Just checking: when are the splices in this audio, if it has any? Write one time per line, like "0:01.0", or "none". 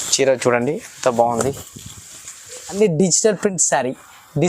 0:02.8